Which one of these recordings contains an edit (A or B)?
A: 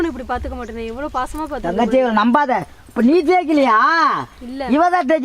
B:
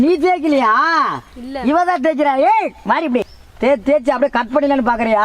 B